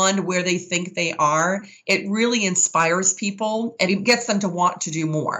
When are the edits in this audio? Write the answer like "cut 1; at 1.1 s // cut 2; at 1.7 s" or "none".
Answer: cut 1; at 3.9 s